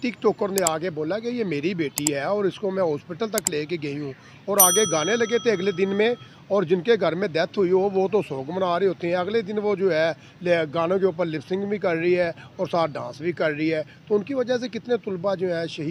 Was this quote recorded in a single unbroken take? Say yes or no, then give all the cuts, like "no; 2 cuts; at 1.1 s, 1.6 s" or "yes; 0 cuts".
yes; 0 cuts